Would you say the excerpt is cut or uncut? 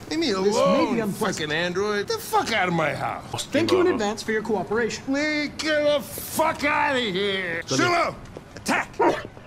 cut